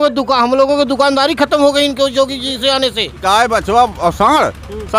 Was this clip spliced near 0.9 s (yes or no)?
no